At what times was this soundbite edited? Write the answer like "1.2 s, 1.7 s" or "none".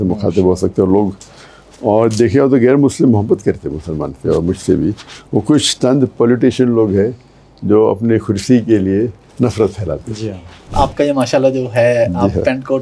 10.7 s